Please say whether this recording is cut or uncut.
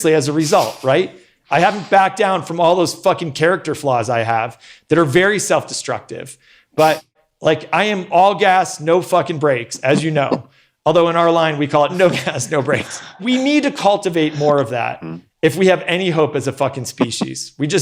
cut